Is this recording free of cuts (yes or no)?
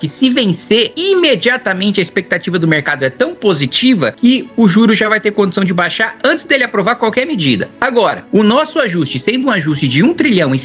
no